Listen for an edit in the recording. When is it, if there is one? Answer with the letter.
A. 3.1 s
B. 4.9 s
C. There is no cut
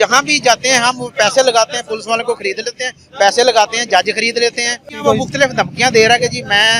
B